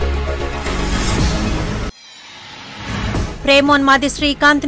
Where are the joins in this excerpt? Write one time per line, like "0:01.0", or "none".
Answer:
0:01.2
0:03.2